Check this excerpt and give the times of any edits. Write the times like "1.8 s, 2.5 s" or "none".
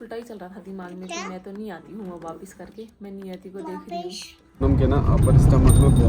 4.6 s